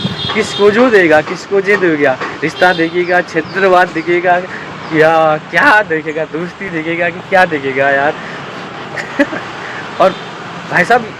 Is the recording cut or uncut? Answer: uncut